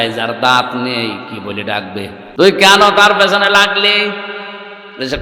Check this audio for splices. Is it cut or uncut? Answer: cut